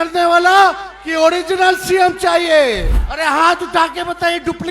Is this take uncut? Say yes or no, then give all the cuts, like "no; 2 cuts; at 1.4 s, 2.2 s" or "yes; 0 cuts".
no; 1 cut; at 3.0 s